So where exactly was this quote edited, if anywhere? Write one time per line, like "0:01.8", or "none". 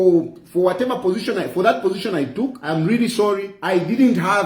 0:02.6
0:03.5